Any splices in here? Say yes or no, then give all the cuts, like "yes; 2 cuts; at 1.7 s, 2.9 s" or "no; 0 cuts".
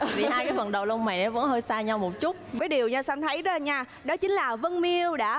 yes; 1 cut; at 2.6 s